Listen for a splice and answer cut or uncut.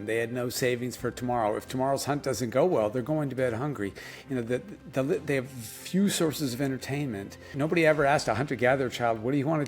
cut